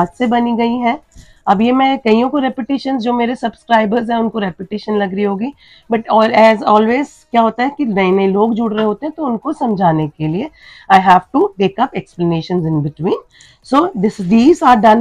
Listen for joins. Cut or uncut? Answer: uncut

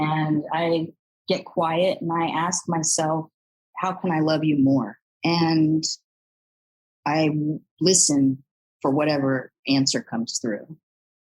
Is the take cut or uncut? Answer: cut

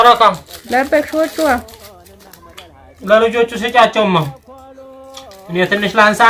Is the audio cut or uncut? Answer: uncut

